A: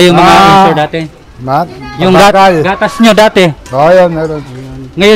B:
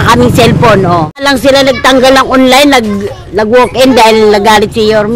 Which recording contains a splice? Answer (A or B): B